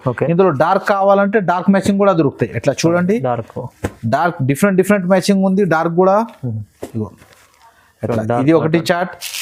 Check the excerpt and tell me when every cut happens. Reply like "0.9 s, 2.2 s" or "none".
none

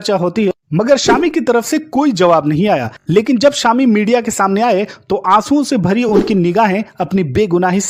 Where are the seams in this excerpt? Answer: none

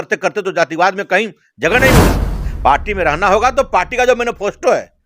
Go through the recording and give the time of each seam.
2.3 s

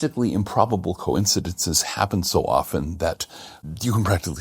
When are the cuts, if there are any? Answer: none

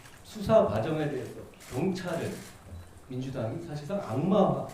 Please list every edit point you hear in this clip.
1.6 s

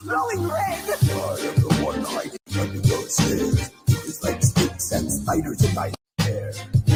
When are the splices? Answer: none

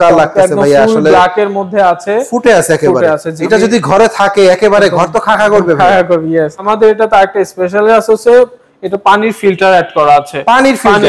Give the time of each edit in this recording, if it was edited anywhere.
3.3 s, 6.7 s

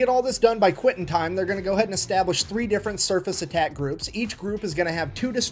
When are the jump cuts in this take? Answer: none

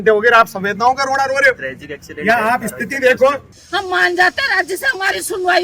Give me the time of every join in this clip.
3.5 s

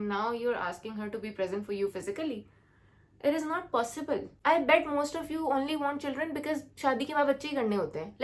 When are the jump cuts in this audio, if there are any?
4.3 s

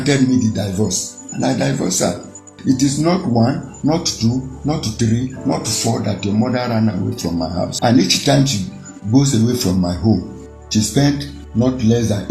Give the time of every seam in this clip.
2.5 s, 7.7 s

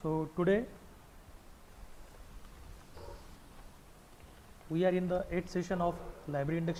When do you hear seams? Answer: none

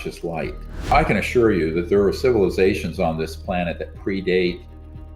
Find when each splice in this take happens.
0.9 s

